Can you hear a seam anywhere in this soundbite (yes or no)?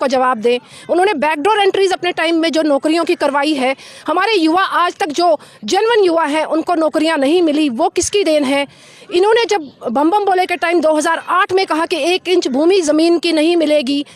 no